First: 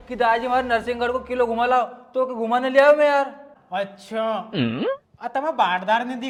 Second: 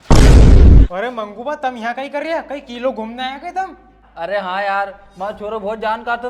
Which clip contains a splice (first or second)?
second